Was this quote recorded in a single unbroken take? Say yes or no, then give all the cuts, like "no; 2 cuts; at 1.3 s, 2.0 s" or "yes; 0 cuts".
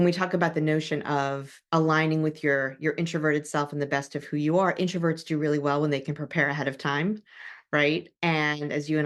no; 1 cut; at 1.5 s